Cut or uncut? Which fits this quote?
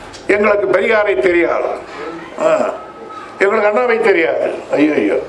uncut